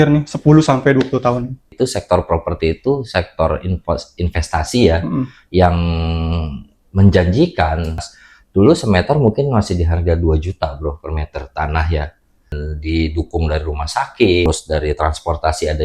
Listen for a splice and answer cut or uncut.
cut